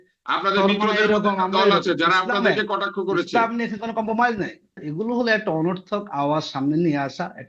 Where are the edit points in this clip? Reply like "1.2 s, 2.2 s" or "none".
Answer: 4.7 s